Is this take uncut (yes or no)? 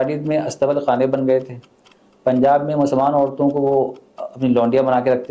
yes